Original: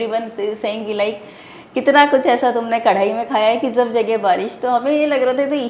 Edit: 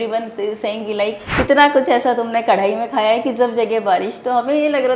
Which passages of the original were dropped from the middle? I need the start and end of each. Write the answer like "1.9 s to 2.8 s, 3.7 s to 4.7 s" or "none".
1.2 s to 1.6 s